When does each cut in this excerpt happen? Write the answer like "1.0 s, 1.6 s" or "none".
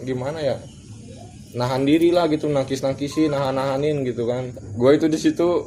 4.4 s